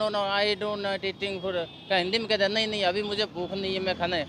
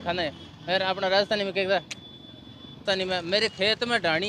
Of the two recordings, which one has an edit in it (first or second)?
second